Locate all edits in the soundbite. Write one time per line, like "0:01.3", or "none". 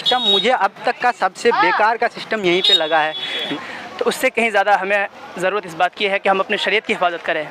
0:03.5